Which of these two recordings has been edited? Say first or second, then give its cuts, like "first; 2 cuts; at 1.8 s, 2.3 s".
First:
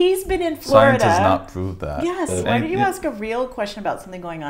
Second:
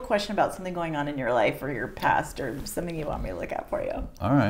first; 1 cut; at 2.4 s